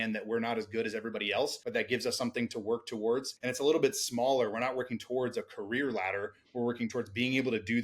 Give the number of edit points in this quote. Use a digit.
2